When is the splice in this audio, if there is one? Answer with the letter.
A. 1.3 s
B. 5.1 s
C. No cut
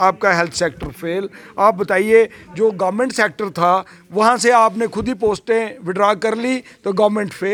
C